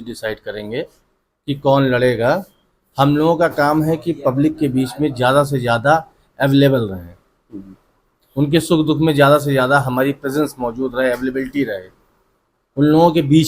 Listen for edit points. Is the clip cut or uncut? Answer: uncut